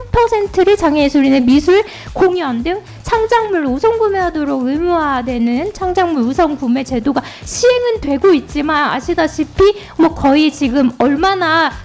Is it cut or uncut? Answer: uncut